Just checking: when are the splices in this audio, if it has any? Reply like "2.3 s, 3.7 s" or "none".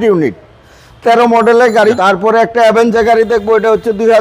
2.0 s